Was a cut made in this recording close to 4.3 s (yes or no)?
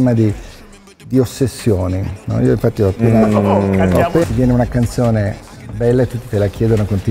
yes